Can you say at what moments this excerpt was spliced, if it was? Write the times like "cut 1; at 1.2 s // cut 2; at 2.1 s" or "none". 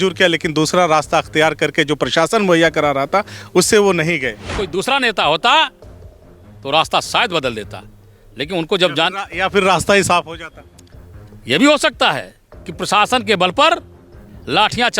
cut 1; at 4.6 s

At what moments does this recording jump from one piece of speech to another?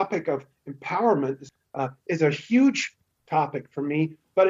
cut 1; at 1.5 s

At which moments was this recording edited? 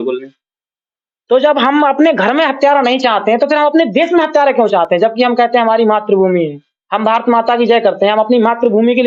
none

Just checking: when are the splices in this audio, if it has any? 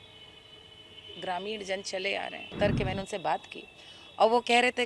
cut 1; at 2.6 s

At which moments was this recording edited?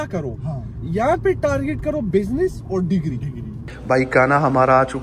cut 1; at 3.5 s

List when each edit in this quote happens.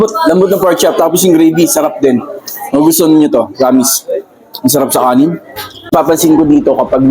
cut 1; at 5.9 s

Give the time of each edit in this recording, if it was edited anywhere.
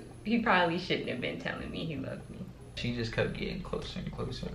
cut 1; at 2.8 s

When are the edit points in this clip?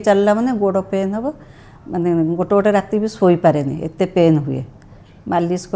none

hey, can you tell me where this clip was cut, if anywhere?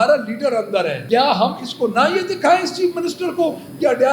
cut 1; at 1.0 s

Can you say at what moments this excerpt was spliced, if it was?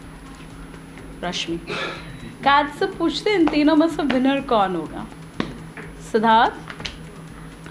cut 1; at 2.1 s

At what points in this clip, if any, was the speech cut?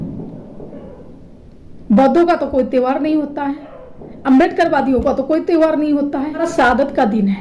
cut 1; at 6.5 s

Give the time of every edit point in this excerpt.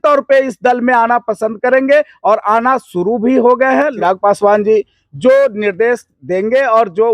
cut 1; at 3.9 s

